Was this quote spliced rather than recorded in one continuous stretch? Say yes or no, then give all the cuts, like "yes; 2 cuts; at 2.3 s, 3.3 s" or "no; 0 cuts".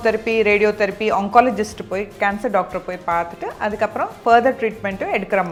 no; 0 cuts